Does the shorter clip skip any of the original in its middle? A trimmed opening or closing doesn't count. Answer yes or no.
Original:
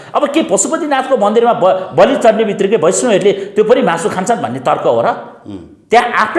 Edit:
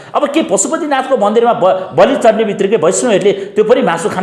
no